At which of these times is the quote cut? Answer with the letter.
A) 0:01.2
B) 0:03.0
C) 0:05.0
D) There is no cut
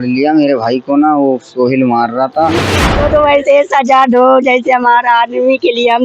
B